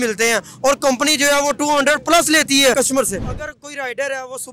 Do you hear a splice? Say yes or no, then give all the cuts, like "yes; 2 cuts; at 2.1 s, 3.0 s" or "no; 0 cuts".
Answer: yes; 1 cut; at 3.0 s